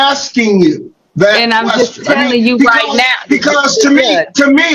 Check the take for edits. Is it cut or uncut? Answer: uncut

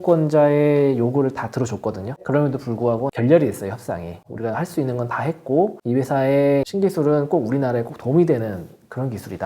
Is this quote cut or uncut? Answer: cut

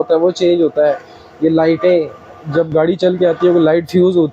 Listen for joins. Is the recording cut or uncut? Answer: uncut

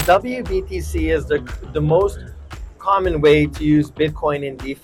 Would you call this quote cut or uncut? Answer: uncut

